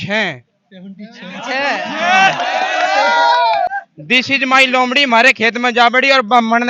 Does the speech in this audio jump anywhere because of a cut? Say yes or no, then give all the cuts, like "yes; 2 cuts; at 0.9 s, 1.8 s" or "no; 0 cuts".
yes; 1 cut; at 3.7 s